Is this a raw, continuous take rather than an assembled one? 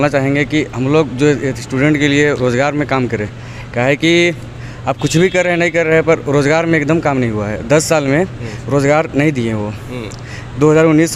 yes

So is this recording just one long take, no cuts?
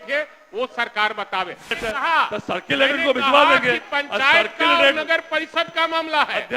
no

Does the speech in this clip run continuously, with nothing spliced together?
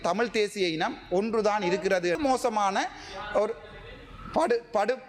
no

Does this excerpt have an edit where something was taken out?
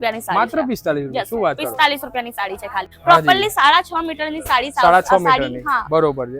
yes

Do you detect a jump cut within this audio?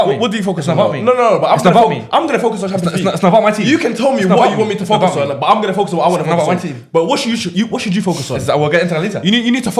no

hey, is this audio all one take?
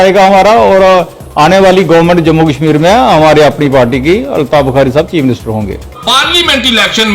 no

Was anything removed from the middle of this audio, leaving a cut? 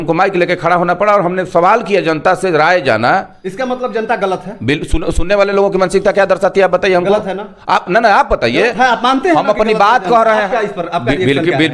yes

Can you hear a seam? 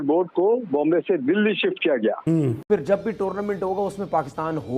yes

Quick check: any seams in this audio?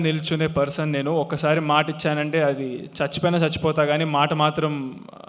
no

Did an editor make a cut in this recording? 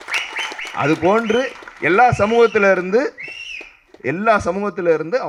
no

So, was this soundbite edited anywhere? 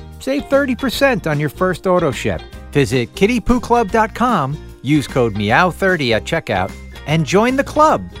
no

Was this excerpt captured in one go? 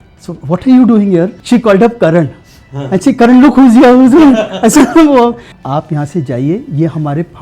no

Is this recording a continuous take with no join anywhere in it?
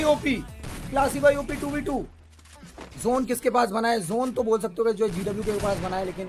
no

